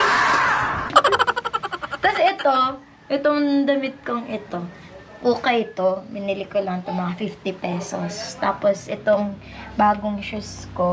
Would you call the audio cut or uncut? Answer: uncut